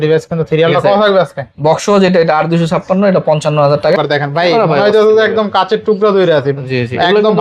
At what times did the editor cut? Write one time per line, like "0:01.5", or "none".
0:04.0